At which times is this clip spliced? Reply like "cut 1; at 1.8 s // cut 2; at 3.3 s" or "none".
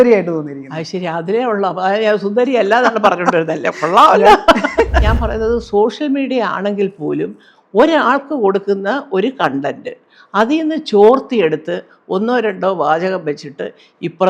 cut 1; at 5.1 s